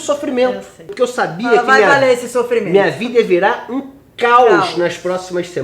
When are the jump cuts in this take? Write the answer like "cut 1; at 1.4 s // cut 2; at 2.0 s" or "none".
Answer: cut 1; at 0.9 s